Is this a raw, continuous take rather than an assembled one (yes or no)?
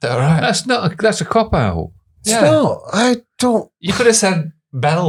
yes